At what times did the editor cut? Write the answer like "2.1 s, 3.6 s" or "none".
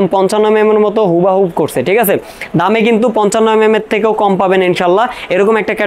none